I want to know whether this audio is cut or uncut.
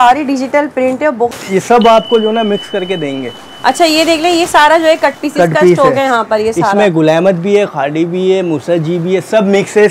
cut